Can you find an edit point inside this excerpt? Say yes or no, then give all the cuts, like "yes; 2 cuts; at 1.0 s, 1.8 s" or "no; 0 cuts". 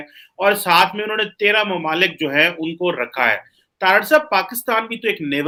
no; 0 cuts